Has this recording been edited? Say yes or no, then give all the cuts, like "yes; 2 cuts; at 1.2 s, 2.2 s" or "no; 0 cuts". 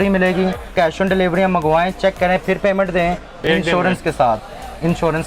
yes; 2 cuts; at 0.7 s, 3.4 s